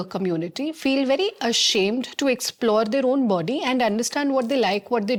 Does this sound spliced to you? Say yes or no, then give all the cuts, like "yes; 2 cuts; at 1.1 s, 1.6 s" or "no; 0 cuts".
no; 0 cuts